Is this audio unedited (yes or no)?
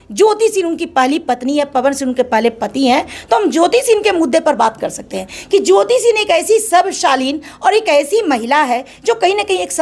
yes